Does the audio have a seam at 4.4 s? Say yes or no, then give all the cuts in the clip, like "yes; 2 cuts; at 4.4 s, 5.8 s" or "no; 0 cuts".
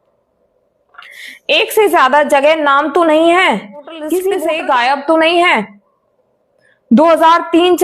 yes; 1 cut; at 4.4 s